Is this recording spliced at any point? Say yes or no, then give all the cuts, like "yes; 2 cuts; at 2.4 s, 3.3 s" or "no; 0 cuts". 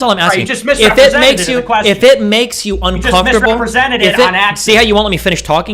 no; 0 cuts